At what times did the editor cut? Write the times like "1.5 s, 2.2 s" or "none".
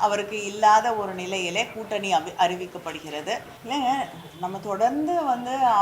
3.5 s